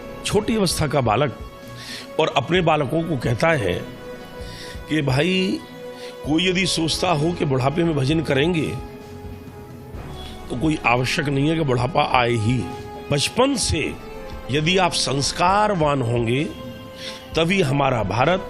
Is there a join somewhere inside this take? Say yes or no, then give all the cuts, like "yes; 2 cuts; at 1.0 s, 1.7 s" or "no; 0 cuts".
yes; 1 cut; at 13.0 s